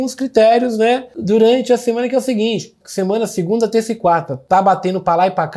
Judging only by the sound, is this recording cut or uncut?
cut